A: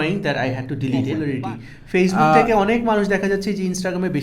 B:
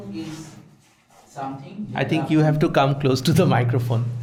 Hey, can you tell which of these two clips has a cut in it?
A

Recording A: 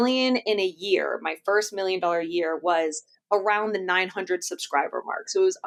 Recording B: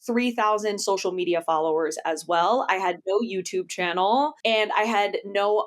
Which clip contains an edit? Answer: B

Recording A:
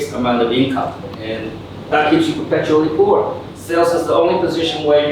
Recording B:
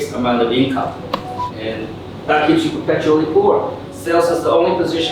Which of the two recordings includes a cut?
A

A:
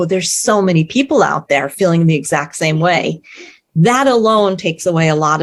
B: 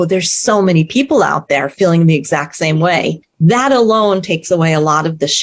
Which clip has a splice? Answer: B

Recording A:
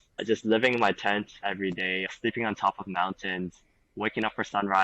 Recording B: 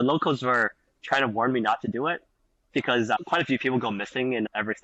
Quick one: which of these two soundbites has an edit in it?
A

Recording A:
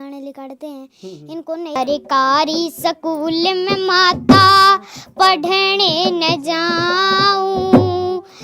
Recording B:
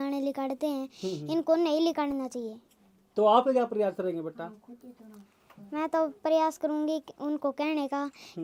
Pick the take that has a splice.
A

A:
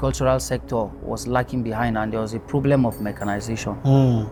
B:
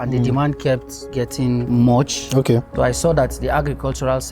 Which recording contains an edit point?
B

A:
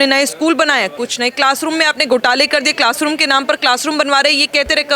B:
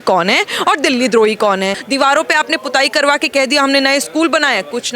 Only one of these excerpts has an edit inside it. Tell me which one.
B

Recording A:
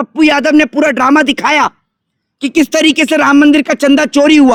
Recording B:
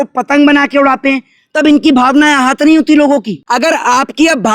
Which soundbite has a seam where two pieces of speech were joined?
B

